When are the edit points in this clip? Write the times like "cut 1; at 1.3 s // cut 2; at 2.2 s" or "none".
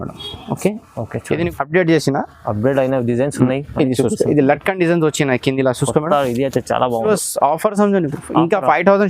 cut 1; at 1.5 s // cut 2; at 6.1 s // cut 3; at 7.1 s